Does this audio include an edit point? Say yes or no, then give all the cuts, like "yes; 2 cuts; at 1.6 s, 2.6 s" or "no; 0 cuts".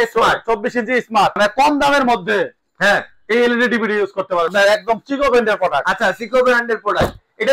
yes; 2 cuts; at 1.3 s, 4.5 s